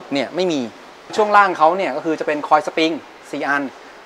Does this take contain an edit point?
yes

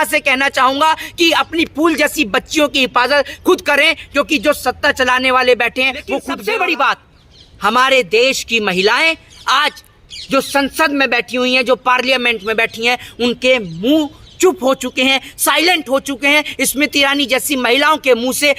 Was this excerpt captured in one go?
no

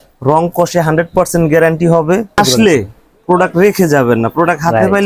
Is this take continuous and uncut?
no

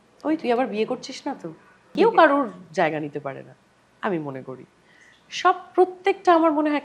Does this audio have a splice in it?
yes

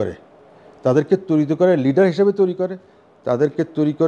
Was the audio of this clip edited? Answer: no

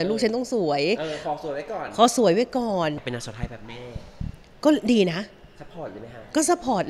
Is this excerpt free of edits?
no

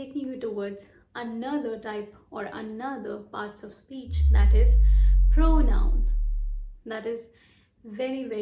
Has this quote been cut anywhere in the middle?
no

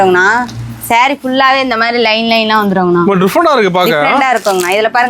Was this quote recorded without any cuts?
yes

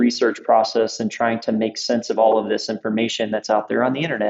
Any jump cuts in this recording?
no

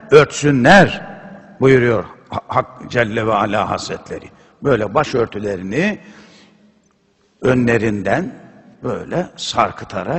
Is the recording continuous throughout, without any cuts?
no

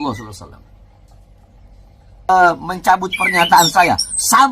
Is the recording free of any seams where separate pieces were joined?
no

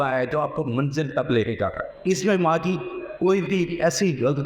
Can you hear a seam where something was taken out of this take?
no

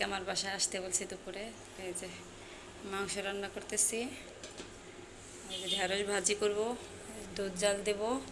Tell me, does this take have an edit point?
no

